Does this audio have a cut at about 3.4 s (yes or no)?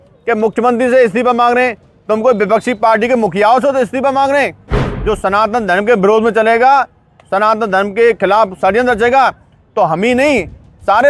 no